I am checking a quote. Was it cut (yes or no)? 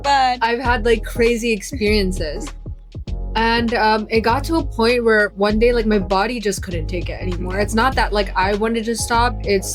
no